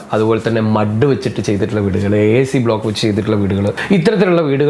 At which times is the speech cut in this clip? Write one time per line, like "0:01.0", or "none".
0:03.8